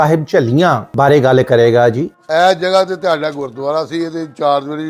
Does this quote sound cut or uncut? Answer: cut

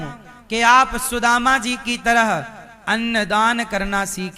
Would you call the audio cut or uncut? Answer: uncut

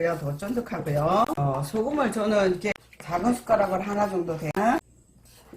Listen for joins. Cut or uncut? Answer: cut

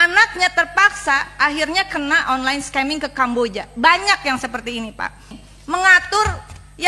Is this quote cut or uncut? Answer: cut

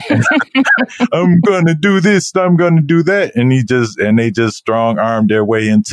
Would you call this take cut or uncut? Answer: uncut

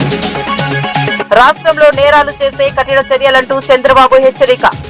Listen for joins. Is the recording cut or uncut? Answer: cut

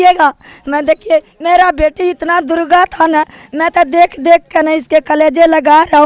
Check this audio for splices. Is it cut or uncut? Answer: uncut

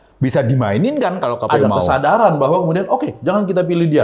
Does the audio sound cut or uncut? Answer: uncut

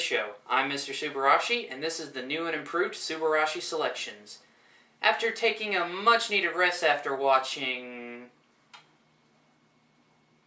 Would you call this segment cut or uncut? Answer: cut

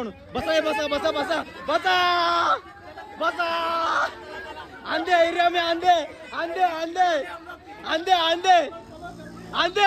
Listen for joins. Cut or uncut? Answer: uncut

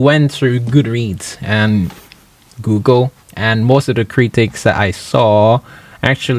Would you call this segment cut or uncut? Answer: uncut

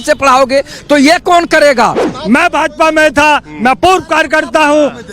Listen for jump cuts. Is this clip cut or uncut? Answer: cut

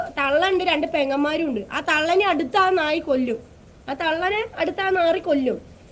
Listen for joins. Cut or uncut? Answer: uncut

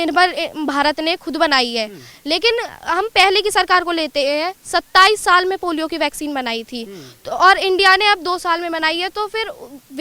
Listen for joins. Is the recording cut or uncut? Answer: uncut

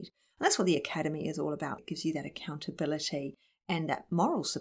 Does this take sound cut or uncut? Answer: cut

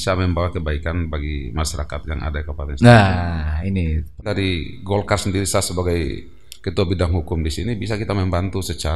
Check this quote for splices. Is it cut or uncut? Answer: cut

